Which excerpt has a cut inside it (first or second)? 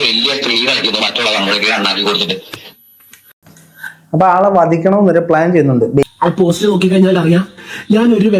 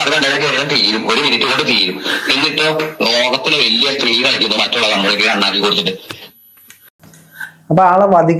first